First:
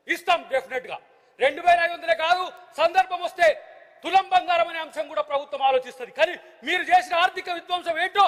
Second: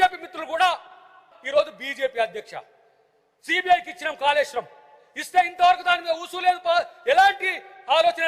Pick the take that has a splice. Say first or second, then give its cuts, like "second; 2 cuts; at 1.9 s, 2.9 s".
second; 1 cut; at 1.3 s